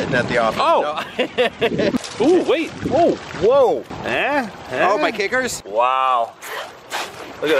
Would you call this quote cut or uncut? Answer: cut